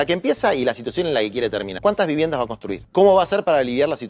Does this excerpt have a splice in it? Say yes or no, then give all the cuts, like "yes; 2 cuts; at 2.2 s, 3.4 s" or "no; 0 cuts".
yes; 2 cuts; at 1.8 s, 2.8 s